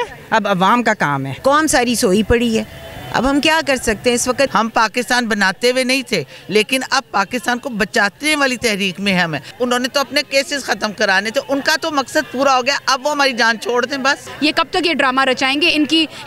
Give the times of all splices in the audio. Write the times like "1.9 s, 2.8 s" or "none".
1.4 s, 4.5 s, 9.5 s, 14.3 s